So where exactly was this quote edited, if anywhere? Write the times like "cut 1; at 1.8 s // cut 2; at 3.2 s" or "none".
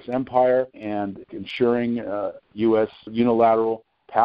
cut 1; at 1.2 s // cut 2; at 3.1 s